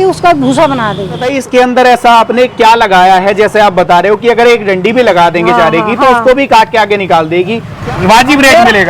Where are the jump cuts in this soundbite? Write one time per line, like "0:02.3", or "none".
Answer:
0:01.3
0:07.7

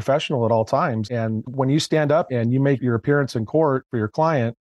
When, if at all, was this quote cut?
0:01.1
0:02.3

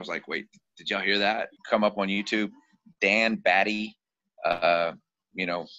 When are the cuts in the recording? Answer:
0:01.5

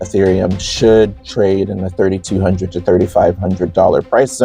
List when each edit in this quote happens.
none

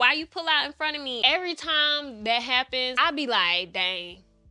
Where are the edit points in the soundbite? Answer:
0:01.2
0:02.9

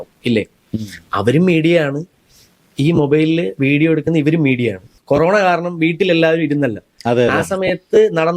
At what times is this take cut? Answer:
0:04.9

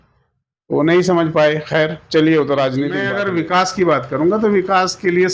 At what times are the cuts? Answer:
0:03.0

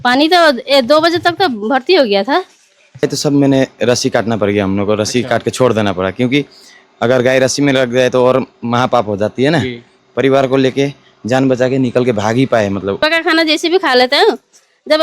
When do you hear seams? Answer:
0:03.0
0:09.9
0:13.0

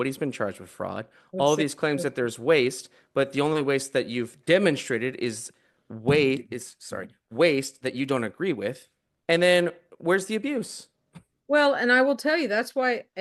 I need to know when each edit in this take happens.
none

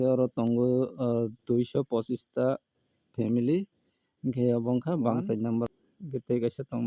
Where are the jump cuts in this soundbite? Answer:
0:05.7

